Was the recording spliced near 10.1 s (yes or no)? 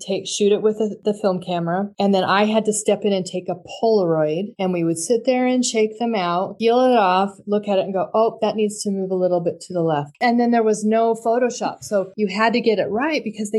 yes